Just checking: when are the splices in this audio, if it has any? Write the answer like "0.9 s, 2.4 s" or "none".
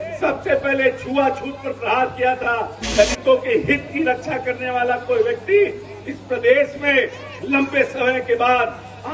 2.9 s